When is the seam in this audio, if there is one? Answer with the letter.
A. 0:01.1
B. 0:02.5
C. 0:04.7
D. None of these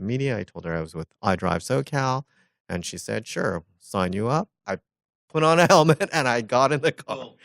C